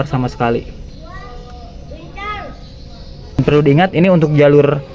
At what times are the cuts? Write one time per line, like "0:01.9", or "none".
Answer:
0:03.4